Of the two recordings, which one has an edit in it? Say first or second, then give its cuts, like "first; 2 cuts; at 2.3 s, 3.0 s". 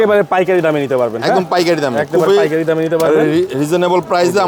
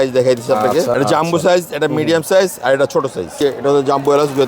second; 2 cuts; at 0.9 s, 3.4 s